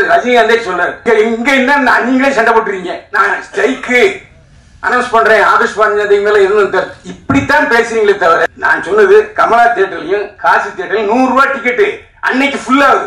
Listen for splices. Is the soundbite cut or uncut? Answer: cut